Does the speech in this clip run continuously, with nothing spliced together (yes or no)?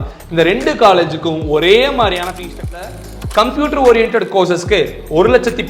no